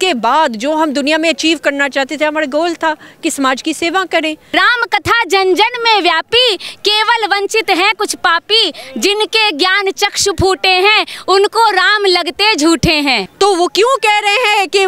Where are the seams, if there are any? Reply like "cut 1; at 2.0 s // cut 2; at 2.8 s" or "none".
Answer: cut 1; at 4.5 s // cut 2; at 13.3 s